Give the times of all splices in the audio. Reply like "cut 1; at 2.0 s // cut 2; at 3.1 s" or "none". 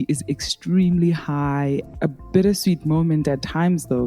cut 1; at 1.9 s